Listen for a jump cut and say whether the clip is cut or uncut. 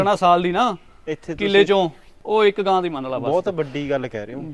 uncut